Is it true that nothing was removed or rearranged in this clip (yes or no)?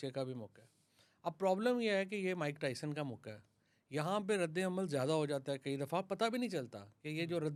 yes